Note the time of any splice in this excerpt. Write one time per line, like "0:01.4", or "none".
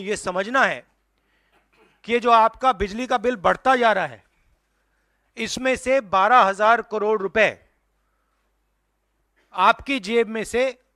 none